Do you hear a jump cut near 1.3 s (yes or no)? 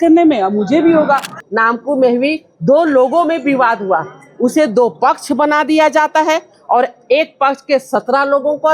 yes